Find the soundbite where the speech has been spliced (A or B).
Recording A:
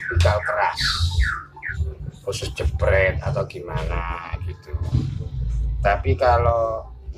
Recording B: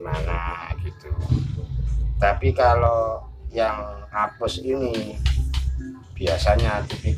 A